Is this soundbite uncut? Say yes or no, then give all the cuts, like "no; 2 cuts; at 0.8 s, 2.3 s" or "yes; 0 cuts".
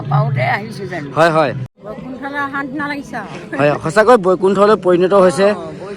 no; 1 cut; at 1.7 s